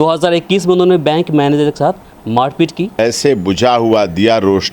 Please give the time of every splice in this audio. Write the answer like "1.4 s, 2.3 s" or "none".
3.0 s